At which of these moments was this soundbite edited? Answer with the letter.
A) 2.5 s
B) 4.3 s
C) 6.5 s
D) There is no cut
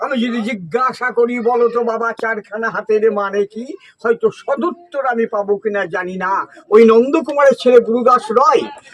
C